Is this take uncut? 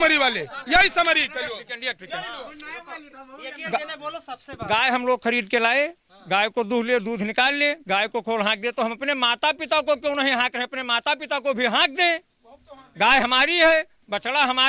yes; 0 cuts

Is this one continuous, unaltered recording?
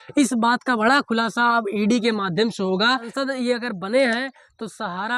no; 1 cut; at 3.1 s

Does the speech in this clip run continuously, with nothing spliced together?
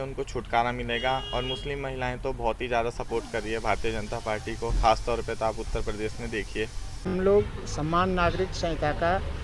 no; 1 cut; at 7.1 s

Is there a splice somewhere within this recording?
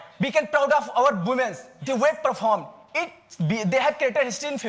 no; 0 cuts

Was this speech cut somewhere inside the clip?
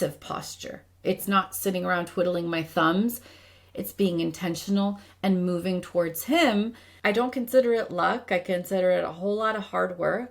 yes; 1 cut; at 6.9 s

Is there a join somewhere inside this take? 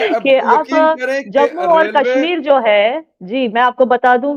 no; 0 cuts

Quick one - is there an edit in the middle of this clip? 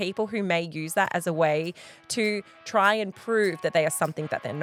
no; 0 cuts

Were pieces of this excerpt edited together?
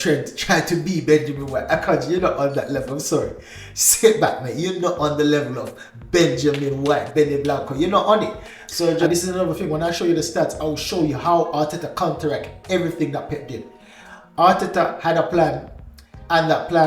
yes; 1 cut; at 9.1 s

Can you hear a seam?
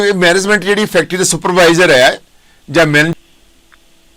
yes; 1 cut; at 3.1 s

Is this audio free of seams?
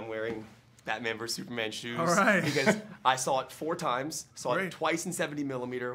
no; 1 cut; at 2.3 s

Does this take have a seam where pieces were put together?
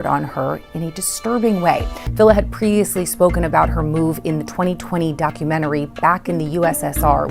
yes; 1 cut; at 2.0 s

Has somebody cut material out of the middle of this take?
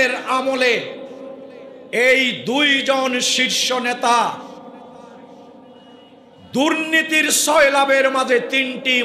no; 0 cuts

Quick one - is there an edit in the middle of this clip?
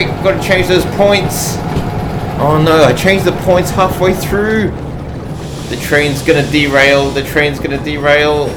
no; 0 cuts

